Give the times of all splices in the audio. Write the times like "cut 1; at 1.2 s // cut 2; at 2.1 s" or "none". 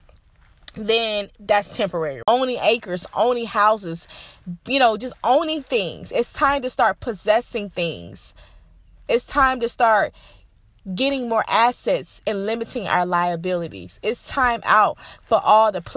cut 1; at 2.2 s